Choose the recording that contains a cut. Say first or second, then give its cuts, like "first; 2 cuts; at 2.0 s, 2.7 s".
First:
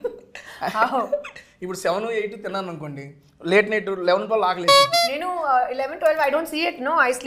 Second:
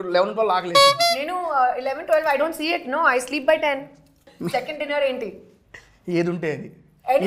second; 1 cut; at 4.3 s